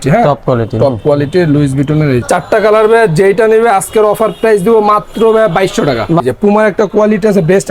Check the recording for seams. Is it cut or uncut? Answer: cut